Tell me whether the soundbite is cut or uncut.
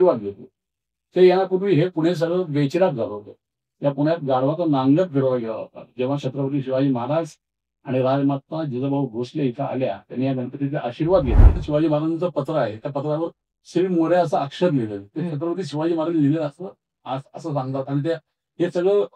cut